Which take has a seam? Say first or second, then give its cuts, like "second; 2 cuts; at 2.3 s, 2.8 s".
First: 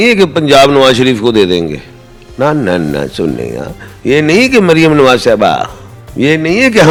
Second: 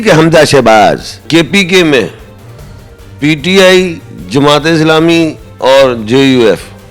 second; 1 cut; at 1.2 s